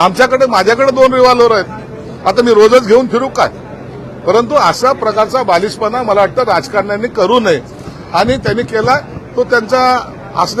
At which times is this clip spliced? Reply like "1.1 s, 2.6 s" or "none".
none